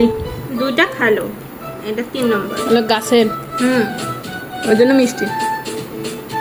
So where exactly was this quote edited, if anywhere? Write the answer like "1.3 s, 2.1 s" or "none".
none